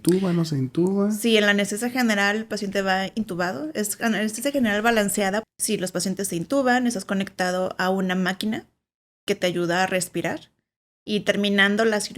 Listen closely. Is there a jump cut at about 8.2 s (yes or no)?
no